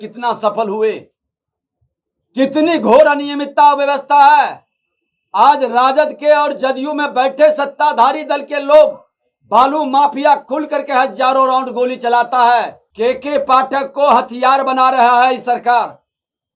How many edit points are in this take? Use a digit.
1